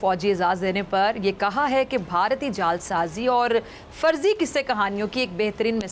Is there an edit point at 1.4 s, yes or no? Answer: no